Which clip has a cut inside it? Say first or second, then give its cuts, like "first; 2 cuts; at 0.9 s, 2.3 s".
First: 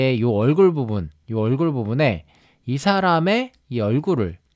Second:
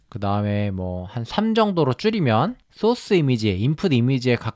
second; 1 cut; at 2.6 s